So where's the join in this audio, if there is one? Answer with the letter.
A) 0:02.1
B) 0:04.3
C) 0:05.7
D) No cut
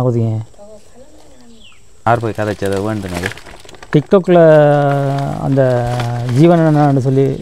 A